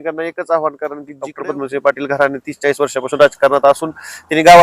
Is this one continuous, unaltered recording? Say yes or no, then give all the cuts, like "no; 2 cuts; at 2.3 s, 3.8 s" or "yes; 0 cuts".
no; 1 cut; at 1.3 s